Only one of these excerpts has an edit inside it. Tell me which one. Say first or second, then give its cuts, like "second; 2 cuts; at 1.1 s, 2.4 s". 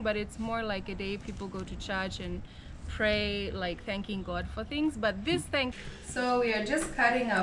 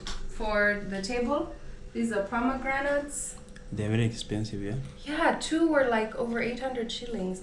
first; 1 cut; at 5.9 s